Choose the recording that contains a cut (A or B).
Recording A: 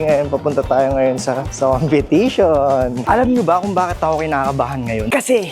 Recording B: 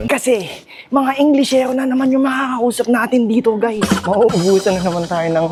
A